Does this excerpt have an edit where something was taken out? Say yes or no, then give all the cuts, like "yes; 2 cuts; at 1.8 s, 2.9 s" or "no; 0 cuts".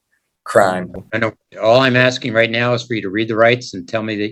no; 0 cuts